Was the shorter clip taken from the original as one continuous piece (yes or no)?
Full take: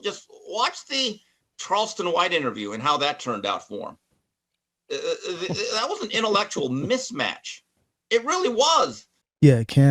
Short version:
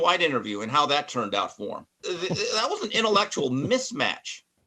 no